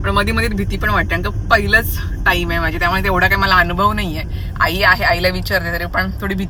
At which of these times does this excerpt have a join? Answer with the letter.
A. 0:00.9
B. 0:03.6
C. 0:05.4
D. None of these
D